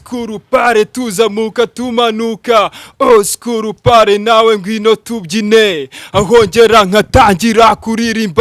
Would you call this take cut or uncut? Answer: uncut